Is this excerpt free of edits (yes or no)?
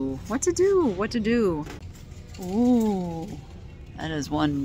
no